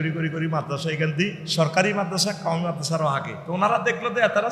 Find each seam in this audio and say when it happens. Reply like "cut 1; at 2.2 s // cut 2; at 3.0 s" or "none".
cut 1; at 1.4 s // cut 2; at 3.4 s

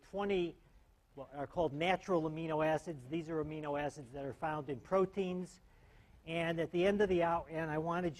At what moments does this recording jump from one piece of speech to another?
cut 1; at 4.0 s

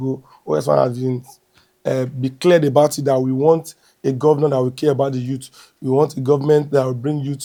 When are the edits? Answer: none

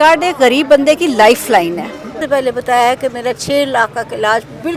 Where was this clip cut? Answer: cut 1; at 2.2 s

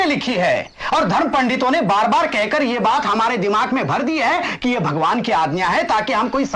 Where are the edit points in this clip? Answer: none

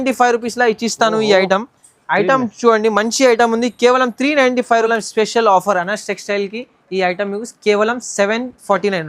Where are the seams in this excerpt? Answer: cut 1; at 4.9 s

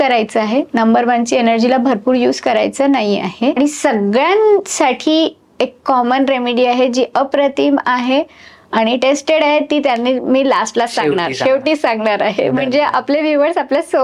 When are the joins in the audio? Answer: cut 1; at 3.6 s

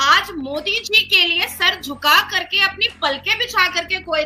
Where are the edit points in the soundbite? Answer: none

